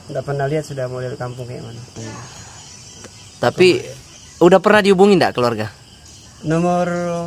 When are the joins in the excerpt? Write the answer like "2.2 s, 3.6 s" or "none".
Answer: 2.0 s